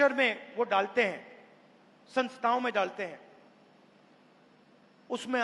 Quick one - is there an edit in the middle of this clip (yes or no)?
no